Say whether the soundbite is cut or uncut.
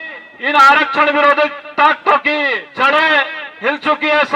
cut